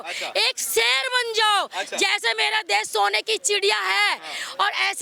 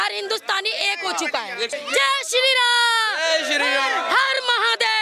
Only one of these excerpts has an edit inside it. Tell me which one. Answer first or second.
second